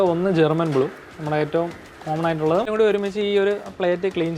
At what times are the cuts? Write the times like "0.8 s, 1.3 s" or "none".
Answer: 2.7 s